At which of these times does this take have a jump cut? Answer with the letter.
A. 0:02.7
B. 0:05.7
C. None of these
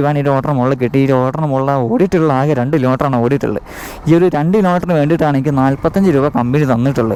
C